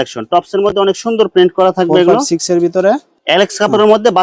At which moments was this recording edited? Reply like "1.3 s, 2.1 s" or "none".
3.1 s